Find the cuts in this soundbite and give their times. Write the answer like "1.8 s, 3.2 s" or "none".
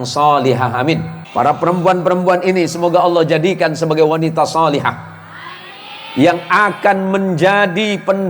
1.2 s